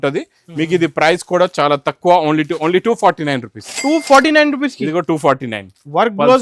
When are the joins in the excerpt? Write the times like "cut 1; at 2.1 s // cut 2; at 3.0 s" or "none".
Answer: none